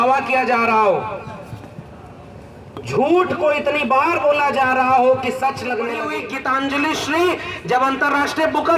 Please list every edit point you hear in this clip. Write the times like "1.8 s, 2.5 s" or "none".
6.0 s